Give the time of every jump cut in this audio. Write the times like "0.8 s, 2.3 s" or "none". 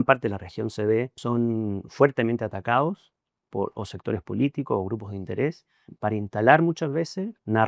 1.2 s, 5.8 s